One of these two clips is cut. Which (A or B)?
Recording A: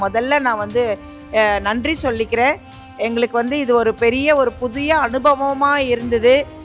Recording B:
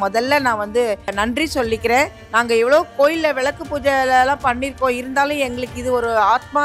B